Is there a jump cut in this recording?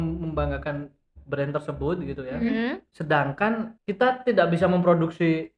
yes; 2 cuts; at 2.9 s, 3.8 s

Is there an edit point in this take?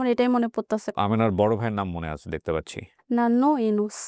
yes; 2 cuts; at 0.9 s, 3.0 s

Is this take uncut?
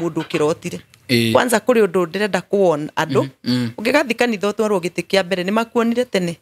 no; 1 cut; at 1.3 s

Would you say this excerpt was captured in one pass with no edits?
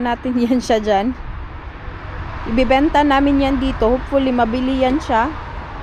yes; 0 cuts

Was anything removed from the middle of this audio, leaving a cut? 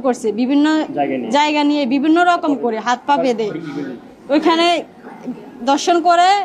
no; 0 cuts

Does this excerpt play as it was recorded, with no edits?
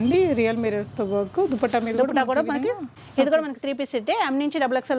yes; 0 cuts

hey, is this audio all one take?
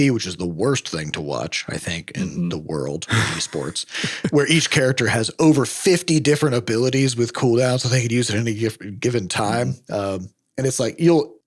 no; 1 cut; at 4.3 s

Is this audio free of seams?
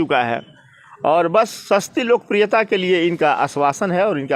yes; 0 cuts

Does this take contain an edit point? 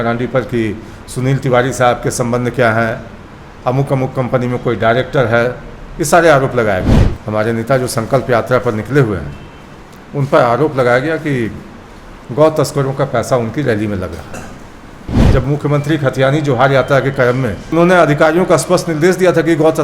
yes; 3 cuts; at 7.0 s, 15.1 s, 17.7 s

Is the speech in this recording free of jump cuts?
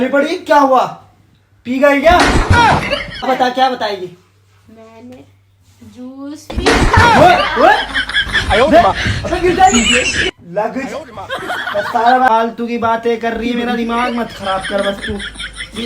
no; 2 cuts; at 3.2 s, 12.3 s

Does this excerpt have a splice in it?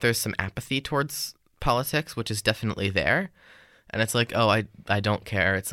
no; 0 cuts

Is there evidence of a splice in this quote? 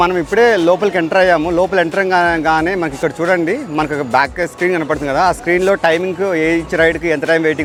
no; 0 cuts

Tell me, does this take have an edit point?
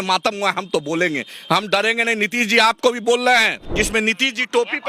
yes; 1 cut; at 3.6 s

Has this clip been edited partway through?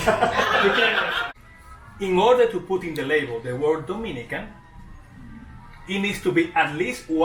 yes; 1 cut; at 1.3 s

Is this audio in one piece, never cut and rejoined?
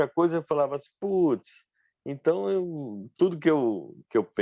yes; 0 cuts

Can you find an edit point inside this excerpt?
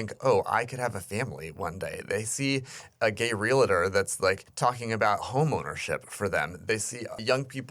yes; 1 cut; at 4.5 s

